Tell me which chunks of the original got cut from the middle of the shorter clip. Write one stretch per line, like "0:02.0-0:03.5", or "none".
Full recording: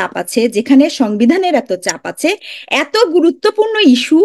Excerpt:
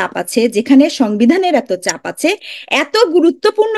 none